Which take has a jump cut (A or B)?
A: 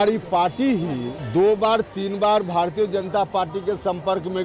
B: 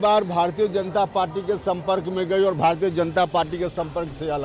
A